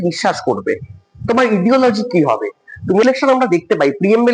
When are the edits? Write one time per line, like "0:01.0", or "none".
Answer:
0:03.0